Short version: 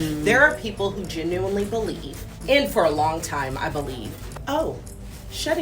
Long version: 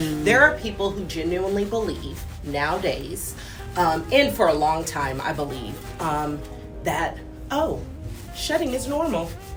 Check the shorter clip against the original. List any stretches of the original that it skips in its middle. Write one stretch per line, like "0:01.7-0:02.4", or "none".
0:02.4-0:04.0
0:05.9-0:07.3